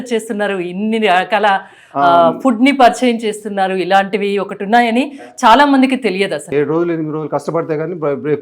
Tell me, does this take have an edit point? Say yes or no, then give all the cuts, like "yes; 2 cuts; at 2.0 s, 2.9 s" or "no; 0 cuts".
yes; 1 cut; at 6.5 s